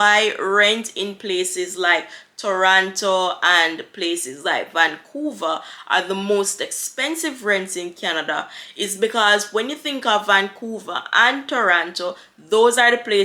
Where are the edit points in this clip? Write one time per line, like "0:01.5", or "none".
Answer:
none